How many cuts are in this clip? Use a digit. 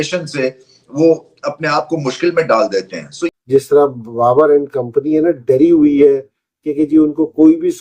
1